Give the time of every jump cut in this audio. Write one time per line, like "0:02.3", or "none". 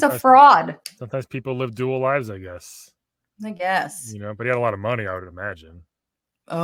none